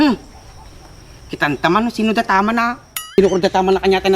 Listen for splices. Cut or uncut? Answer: cut